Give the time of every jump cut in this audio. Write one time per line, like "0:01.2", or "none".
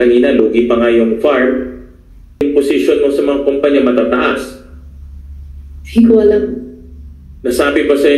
0:02.4